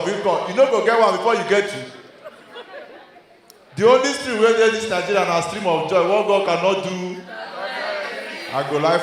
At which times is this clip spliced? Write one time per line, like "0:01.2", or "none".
none